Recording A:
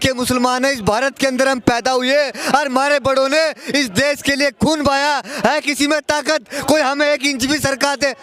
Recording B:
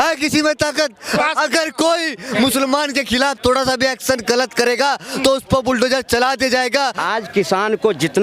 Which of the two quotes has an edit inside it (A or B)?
B